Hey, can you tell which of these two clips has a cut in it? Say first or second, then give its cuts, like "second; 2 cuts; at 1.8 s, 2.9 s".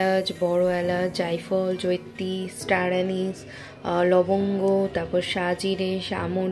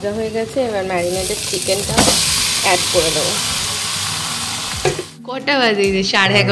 second; 1 cut; at 5.4 s